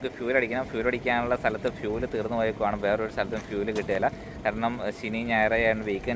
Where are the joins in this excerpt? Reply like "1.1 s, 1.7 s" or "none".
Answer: none